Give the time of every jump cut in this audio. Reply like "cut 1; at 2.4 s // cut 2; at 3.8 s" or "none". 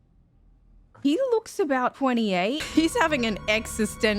cut 1; at 2.6 s

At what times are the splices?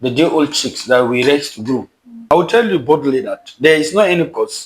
cut 1; at 2.3 s

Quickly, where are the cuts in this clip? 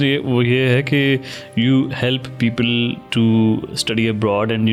none

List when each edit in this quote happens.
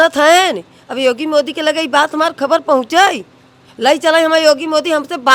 none

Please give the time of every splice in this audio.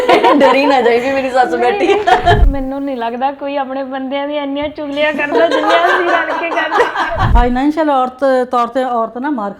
cut 1; at 2.4 s // cut 2; at 7.3 s

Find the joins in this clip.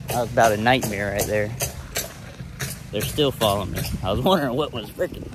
none

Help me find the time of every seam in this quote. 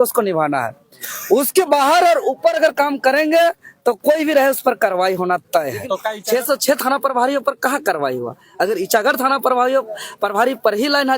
cut 1; at 6.1 s

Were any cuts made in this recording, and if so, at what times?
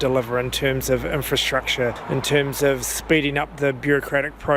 cut 1; at 2.0 s

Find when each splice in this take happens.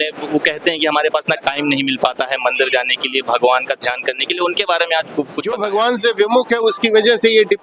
cut 1; at 5.4 s

